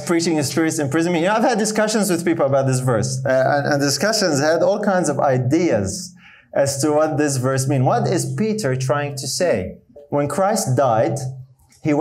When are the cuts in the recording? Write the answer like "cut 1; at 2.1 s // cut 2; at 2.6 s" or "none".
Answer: cut 1; at 10.0 s